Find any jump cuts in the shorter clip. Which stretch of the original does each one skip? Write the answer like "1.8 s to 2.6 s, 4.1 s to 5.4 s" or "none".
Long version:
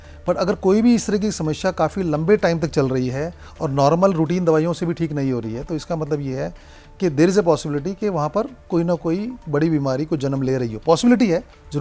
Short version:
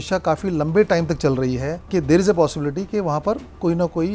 3.3 s to 6.8 s